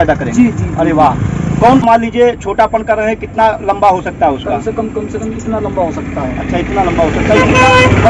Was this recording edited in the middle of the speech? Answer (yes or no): yes